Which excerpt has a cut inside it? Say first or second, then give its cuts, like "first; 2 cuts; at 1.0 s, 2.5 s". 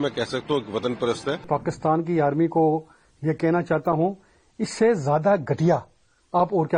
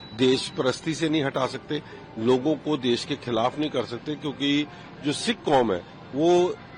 first; 1 cut; at 1.5 s